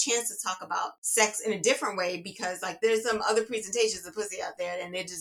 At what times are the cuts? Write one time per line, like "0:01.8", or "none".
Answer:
0:01.0
0:02.7